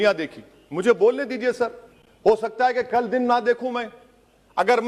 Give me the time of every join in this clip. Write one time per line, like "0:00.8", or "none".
none